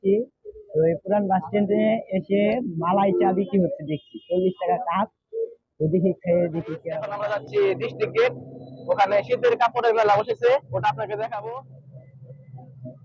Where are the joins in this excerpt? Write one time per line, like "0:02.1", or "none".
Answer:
0:07.1
0:11.4

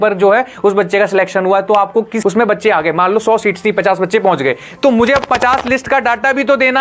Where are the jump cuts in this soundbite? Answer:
0:02.1

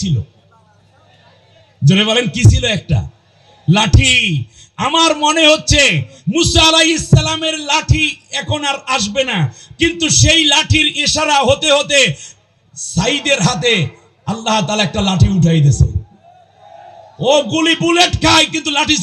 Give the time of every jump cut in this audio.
none

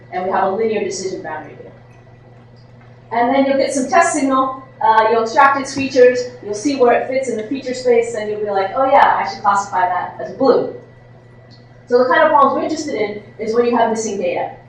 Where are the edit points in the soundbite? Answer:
none

